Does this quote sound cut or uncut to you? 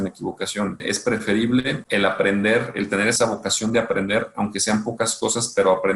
cut